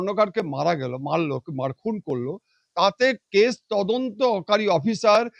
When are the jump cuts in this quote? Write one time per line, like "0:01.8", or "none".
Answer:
none